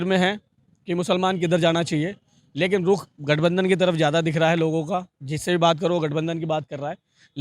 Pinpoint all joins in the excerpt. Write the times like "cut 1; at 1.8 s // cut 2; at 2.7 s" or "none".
none